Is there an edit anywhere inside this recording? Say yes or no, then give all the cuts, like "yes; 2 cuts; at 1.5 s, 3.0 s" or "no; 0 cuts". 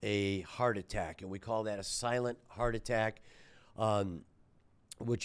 no; 0 cuts